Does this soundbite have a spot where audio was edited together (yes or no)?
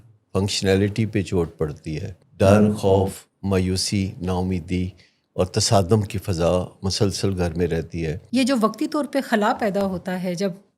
yes